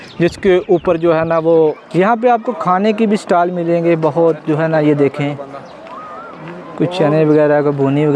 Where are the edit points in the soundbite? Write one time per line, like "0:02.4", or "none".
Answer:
0:01.8